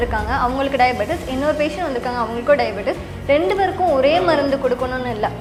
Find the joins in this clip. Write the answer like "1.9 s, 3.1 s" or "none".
none